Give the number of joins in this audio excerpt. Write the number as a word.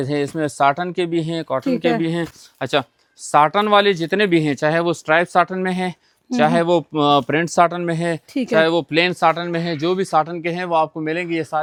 zero